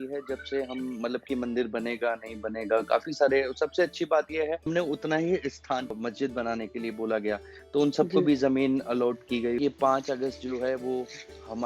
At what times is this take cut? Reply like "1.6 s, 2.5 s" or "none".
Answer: 4.7 s, 6.0 s, 9.6 s